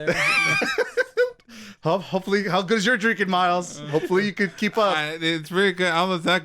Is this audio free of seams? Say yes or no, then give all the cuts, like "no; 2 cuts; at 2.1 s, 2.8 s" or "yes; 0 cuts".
yes; 0 cuts